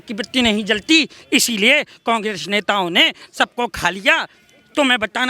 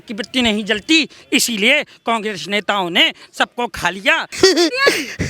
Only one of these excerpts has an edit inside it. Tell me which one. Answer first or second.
second